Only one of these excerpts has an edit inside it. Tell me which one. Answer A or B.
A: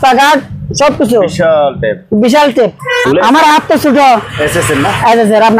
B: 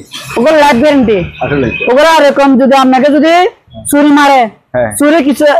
A